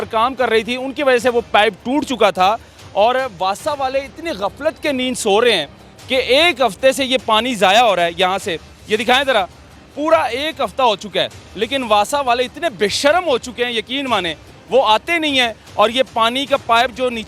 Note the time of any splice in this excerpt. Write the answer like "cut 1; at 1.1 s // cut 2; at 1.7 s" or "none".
none